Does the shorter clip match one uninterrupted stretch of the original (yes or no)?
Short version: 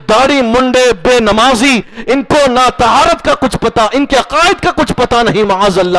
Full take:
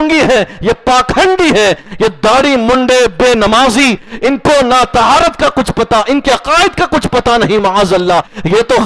yes